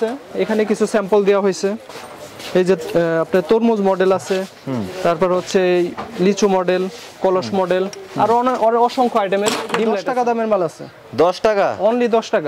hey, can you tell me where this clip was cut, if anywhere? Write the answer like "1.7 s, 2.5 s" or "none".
10.0 s

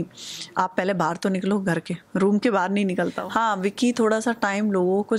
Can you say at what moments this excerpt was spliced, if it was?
3.2 s

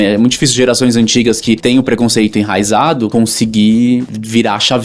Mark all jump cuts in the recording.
1.6 s, 3.1 s, 4.1 s

